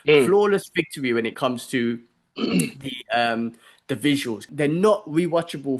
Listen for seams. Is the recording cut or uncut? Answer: cut